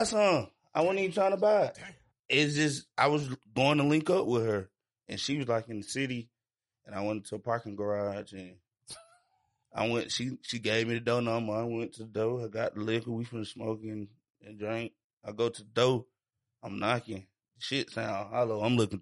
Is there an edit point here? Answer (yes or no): no